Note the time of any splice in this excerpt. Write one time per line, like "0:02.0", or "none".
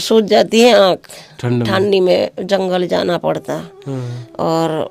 none